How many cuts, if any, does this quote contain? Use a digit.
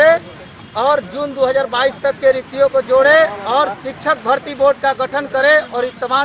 0